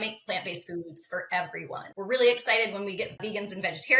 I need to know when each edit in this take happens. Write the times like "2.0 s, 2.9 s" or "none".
1.9 s, 3.2 s